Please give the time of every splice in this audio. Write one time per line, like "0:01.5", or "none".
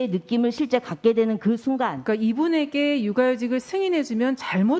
0:02.0